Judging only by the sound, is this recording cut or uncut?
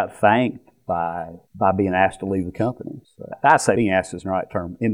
uncut